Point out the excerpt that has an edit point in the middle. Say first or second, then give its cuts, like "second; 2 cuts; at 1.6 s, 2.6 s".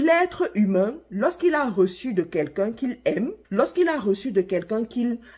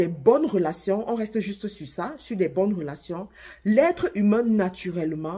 first; 1 cut; at 3.4 s